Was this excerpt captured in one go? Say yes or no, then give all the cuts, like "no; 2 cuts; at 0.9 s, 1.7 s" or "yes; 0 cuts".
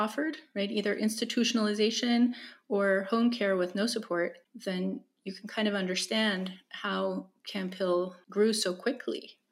no; 2 cuts; at 4.5 s, 8.2 s